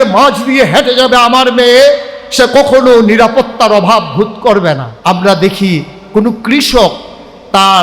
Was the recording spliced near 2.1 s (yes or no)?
no